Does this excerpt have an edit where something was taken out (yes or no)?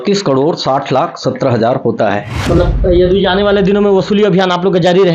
yes